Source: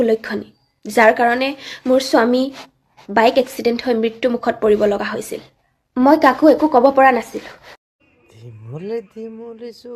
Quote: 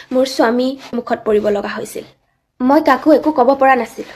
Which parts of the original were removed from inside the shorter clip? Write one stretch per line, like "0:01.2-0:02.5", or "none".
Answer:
0:02.7-0:04.4